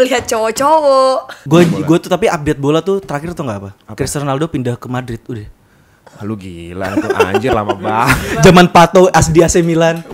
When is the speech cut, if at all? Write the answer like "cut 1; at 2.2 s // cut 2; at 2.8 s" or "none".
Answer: cut 1; at 1.4 s